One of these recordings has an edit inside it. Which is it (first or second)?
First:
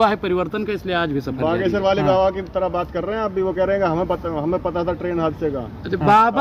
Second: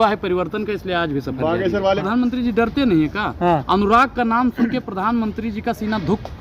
second